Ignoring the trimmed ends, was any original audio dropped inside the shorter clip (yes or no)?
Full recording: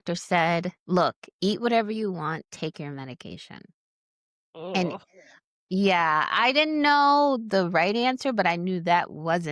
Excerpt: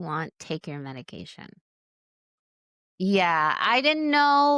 yes